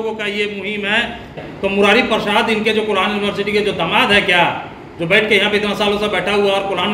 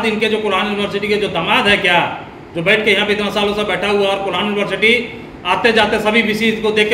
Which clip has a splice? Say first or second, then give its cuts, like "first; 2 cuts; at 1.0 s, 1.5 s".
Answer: first; 1 cut; at 1.4 s